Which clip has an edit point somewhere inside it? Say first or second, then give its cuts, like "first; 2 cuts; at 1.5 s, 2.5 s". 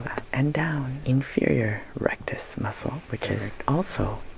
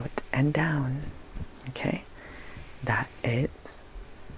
first; 2 cuts; at 0.9 s, 3.5 s